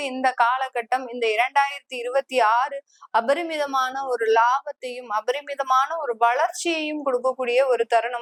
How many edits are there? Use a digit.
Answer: 0